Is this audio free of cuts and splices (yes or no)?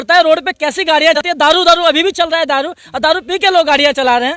no